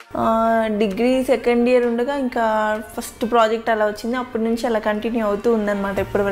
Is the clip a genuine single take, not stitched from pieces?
yes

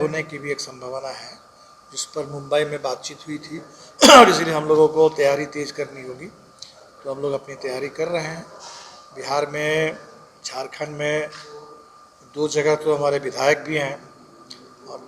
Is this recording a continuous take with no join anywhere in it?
yes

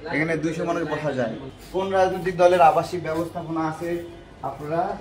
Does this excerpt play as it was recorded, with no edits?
no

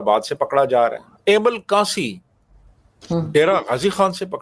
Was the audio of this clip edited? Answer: yes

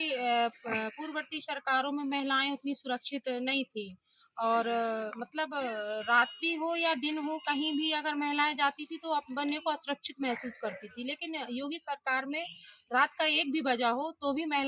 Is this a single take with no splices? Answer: yes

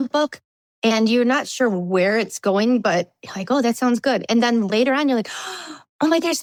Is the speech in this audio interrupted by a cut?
no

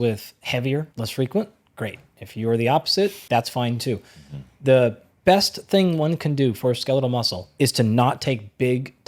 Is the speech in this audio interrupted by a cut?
yes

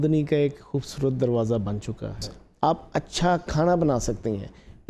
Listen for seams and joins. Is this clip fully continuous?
no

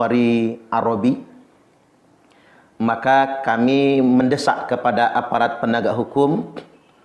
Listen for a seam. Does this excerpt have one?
no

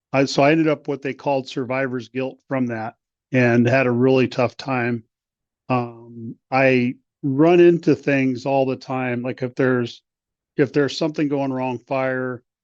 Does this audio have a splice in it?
no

